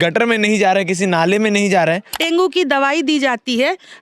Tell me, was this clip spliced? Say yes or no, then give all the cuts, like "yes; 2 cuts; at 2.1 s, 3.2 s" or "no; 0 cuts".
yes; 1 cut; at 2.1 s